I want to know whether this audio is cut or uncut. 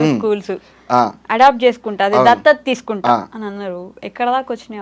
uncut